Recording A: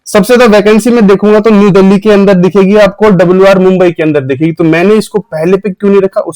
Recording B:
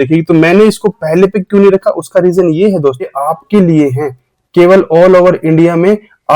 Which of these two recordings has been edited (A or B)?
B